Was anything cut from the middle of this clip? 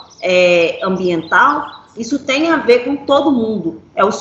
no; 0 cuts

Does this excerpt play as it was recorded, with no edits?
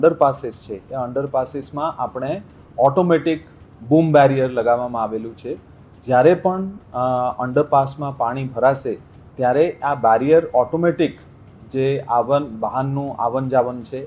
yes; 0 cuts

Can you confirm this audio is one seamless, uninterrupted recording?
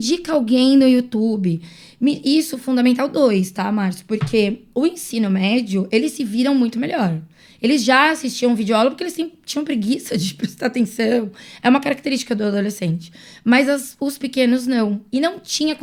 yes; 0 cuts

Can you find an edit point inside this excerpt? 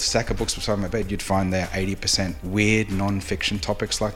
yes; 1 cut; at 2.4 s

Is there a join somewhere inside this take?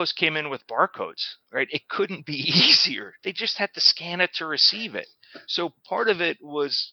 no; 0 cuts

